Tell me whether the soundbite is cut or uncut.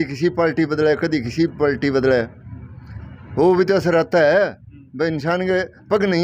uncut